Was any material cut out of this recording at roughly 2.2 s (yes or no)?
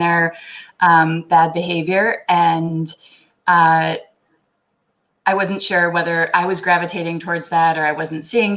no